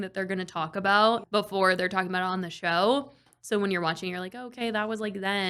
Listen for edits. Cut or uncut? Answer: cut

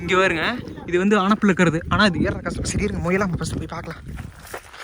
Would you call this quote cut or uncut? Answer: uncut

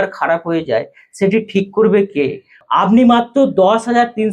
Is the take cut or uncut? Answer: cut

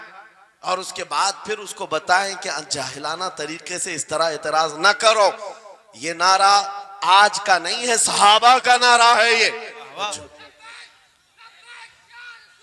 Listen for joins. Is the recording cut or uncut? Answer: cut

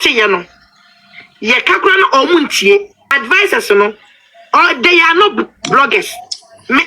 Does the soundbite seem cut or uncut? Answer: cut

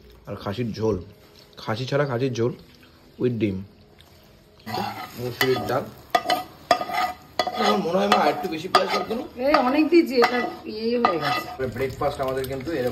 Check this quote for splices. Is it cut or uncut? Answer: cut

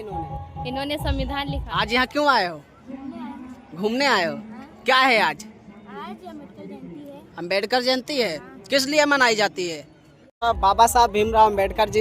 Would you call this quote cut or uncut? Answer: cut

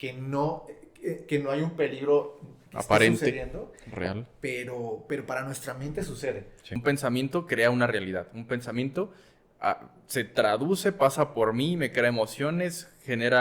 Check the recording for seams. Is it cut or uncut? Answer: cut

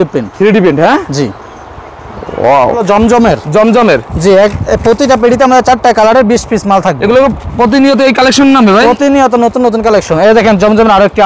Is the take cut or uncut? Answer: cut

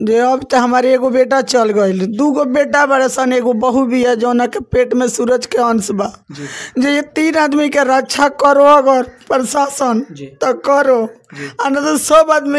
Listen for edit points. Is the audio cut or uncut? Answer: uncut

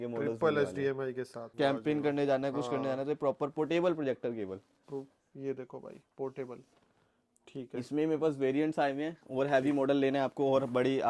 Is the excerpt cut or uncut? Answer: cut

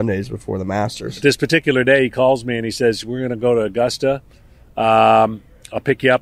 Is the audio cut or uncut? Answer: cut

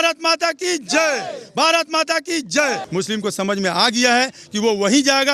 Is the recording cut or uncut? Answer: cut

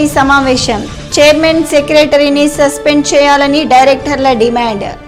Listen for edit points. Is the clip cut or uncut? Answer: uncut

